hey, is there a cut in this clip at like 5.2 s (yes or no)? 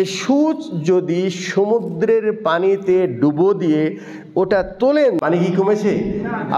yes